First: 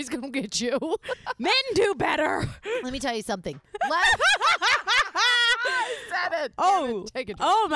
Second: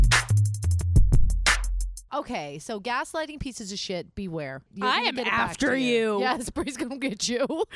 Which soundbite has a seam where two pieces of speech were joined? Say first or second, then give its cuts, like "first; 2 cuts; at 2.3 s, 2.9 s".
second; 2 cuts; at 2.1 s, 4.7 s